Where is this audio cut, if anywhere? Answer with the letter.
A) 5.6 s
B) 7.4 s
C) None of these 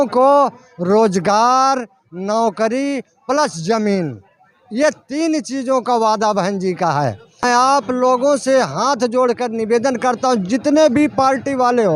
B